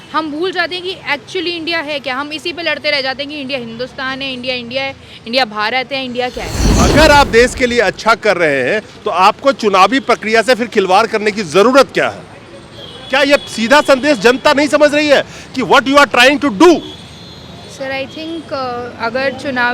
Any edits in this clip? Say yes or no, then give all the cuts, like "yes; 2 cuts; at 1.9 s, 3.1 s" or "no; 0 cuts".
yes; 1 cut; at 6.8 s